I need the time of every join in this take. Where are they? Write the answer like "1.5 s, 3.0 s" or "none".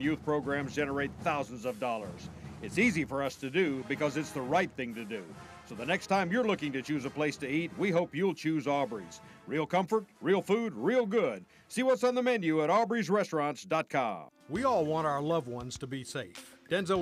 none